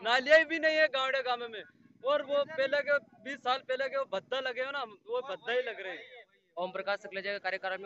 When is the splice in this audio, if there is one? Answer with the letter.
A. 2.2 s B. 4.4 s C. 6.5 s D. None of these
C